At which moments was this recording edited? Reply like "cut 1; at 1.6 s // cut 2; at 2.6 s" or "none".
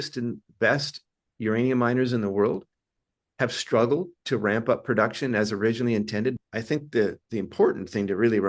cut 1; at 6.4 s